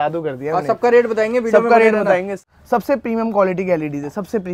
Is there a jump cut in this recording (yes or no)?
yes